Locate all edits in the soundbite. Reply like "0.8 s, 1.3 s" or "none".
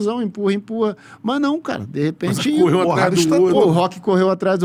none